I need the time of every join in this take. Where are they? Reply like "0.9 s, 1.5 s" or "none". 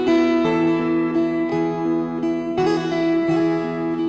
none